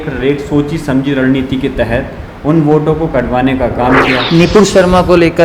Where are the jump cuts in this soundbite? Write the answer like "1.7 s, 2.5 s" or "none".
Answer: 4.2 s